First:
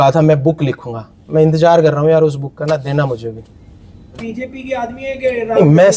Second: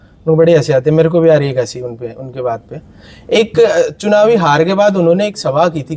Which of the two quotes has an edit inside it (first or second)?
first